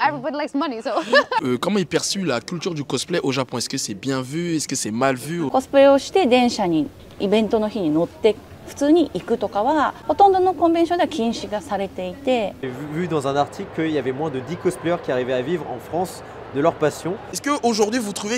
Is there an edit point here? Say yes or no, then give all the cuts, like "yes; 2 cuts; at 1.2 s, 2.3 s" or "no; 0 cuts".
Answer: yes; 5 cuts; at 1.4 s, 5.5 s, 10.0 s, 12.8 s, 17.3 s